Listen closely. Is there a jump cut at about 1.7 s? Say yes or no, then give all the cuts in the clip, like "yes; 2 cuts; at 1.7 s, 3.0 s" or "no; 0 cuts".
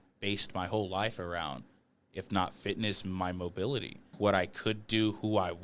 no; 1 cut; at 4.1 s